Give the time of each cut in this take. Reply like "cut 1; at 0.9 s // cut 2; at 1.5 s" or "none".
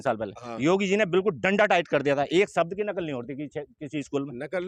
none